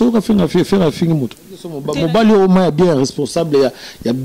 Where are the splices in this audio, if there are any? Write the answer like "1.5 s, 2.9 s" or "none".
1.7 s